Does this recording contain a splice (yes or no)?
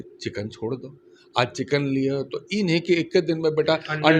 no